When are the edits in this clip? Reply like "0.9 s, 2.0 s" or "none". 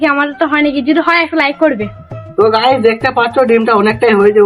2.2 s